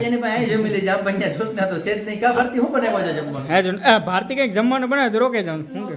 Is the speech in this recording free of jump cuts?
yes; 0 cuts

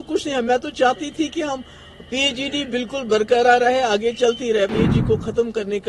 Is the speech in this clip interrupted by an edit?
yes; 1 cut; at 4.7 s

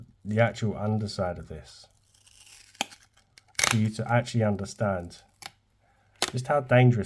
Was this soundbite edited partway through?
no; 0 cuts

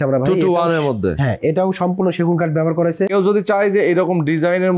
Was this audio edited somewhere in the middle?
yes; 1 cut; at 3.2 s

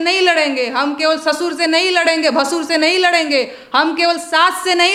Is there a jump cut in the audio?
no; 0 cuts

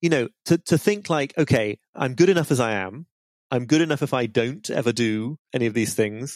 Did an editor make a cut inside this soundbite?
yes; 2 cuts; at 1.9 s, 5.4 s

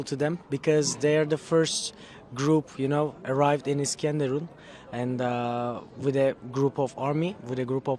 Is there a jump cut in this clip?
no; 0 cuts

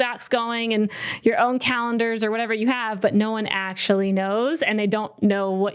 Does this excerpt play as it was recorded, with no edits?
yes; 0 cuts

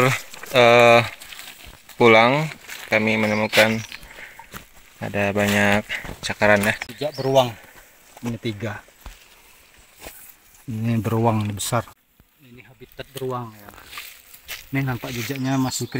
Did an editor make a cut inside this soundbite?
yes; 2 cuts; at 6.9 s, 11.9 s

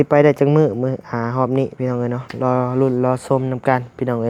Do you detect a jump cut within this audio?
no; 0 cuts

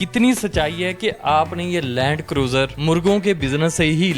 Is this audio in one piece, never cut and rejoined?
no; 1 cut; at 2.8 s

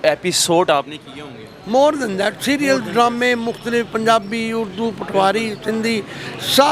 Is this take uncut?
yes; 0 cuts

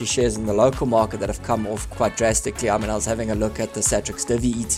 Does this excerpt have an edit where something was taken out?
yes; 1 cut; at 1.8 s

